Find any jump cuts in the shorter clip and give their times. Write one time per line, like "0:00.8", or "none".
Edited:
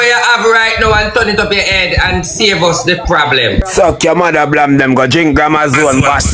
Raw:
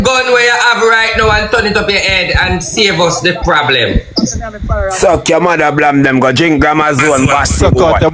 0:03.7